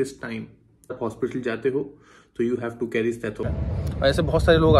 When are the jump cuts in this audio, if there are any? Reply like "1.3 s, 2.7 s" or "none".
0.9 s, 3.4 s